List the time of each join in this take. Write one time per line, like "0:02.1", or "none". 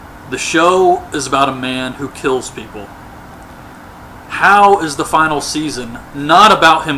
0:04.1